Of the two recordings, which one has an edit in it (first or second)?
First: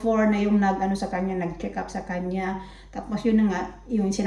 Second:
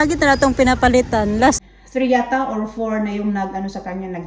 second